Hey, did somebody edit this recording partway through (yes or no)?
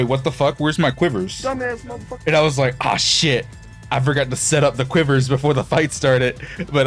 no